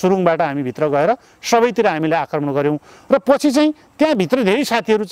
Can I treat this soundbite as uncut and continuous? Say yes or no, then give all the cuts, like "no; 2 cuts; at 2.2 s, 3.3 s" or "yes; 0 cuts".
yes; 0 cuts